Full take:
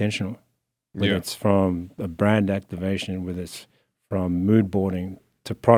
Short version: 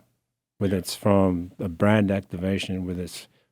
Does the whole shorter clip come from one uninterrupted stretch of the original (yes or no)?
yes